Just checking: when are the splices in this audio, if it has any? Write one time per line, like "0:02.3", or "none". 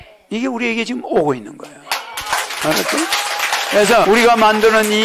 none